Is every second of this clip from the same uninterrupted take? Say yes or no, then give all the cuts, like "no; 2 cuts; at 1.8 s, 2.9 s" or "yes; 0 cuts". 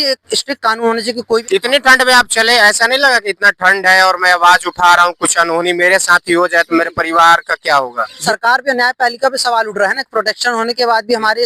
no; 2 cuts; at 1.4 s, 8.2 s